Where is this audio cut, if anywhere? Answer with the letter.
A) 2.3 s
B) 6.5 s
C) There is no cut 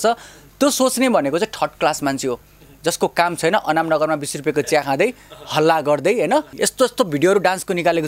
B